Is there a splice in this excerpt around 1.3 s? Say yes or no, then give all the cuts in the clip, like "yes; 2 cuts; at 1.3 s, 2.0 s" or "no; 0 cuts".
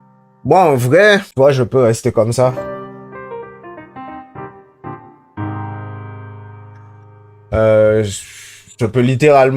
yes; 1 cut; at 1.3 s